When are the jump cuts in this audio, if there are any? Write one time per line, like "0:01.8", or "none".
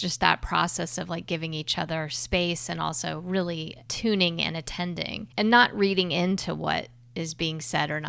0:03.9
0:05.2